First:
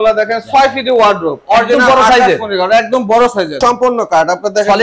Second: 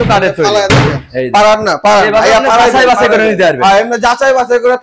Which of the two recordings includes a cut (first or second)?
first